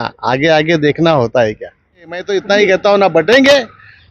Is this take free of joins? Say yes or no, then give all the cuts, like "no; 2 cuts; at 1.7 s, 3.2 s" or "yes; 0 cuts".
no; 1 cut; at 2.3 s